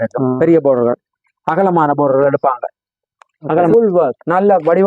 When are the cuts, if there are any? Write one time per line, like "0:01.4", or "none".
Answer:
0:03.7